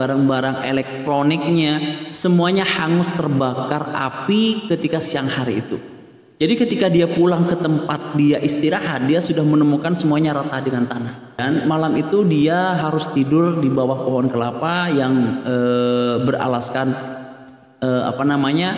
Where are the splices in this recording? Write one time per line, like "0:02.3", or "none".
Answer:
0:11.4